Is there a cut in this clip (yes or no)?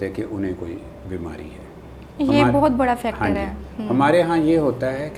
no